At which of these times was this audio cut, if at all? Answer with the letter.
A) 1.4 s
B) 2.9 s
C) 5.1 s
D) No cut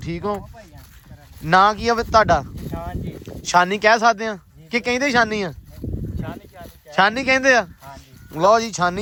D